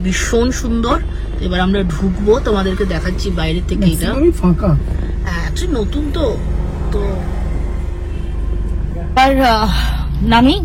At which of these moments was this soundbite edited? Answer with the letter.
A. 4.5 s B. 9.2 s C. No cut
B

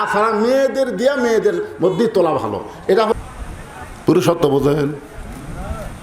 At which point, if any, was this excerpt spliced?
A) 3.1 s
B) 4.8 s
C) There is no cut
A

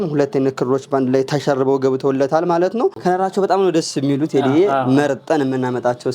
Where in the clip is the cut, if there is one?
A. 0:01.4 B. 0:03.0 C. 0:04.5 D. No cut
B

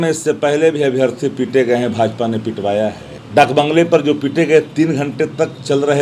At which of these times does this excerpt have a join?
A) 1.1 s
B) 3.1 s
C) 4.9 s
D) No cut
B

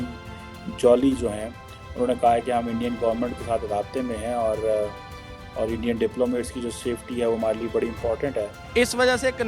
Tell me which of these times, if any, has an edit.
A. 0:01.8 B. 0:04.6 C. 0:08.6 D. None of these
C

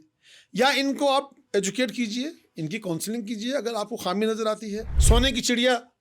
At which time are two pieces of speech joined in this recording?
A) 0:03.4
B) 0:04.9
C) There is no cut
B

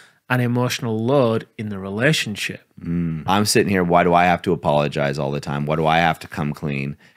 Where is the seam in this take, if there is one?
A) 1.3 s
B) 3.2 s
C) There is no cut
B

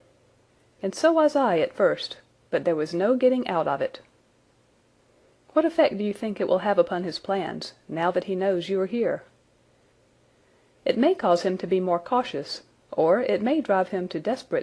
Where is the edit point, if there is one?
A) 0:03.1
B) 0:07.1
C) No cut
B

